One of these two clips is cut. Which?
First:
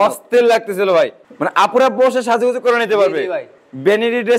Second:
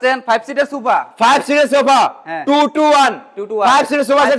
first; 2 cuts; at 1.2 s, 3.5 s

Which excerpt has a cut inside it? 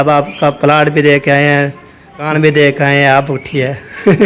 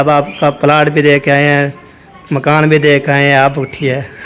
first; 1 cut; at 2.2 s

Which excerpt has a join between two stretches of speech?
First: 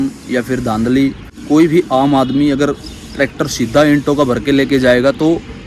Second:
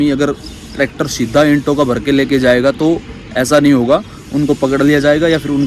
first; 1 cut; at 1.3 s

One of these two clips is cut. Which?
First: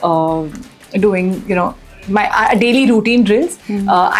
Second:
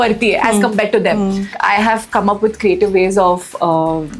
second; 1 cut; at 1.6 s

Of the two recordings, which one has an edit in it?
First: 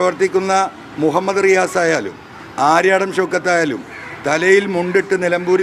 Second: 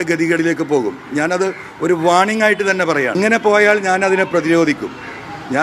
second; 1 cut; at 3.1 s

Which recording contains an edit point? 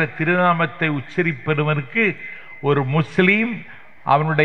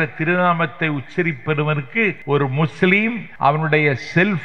second; 2 cuts; at 2.2 s, 3.3 s

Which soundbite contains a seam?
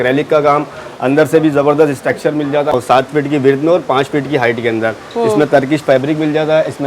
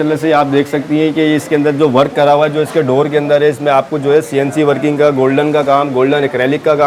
first; 1 cut; at 2.7 s

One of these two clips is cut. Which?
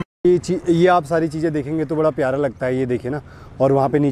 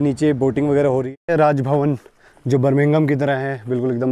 second; 1 cut; at 1.1 s

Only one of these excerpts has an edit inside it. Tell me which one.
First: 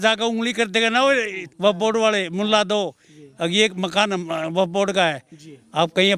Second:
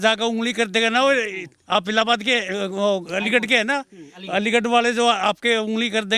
first; 1 cut; at 1.5 s

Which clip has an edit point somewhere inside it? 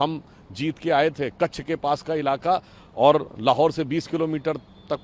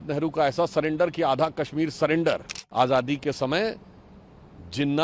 second; 1 cut; at 2.6 s

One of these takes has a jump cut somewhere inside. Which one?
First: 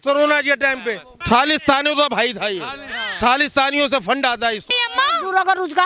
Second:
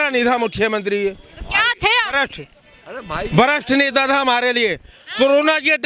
first; 2 cuts; at 1.1 s, 4.7 s

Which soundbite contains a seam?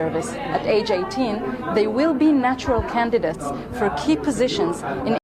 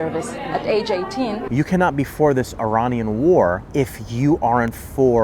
second; 1 cut; at 1.4 s

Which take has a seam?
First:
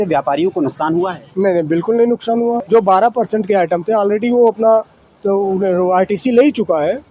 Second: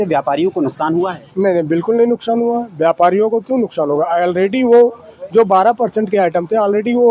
first; 1 cut; at 2.6 s

